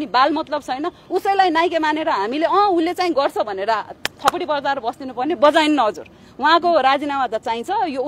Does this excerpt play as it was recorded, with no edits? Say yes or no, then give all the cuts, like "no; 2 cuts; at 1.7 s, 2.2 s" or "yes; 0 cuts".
yes; 0 cuts